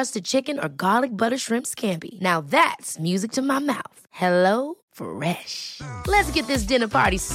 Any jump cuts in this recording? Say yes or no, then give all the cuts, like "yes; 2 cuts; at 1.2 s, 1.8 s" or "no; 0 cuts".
no; 0 cuts